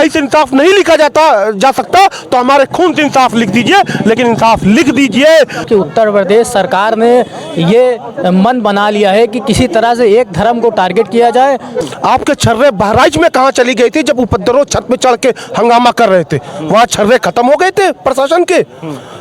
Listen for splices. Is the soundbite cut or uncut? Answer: cut